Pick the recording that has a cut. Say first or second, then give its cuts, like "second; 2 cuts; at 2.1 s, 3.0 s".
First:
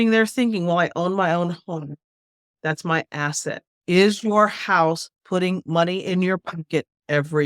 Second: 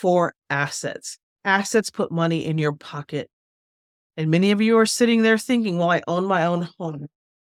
first; 1 cut; at 3.7 s